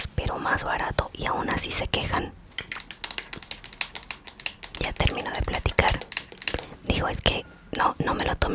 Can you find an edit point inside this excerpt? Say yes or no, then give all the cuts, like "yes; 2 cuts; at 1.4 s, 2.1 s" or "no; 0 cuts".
yes; 1 cut; at 2.4 s